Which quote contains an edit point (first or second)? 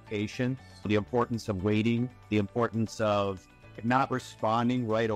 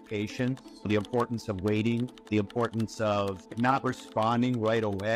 second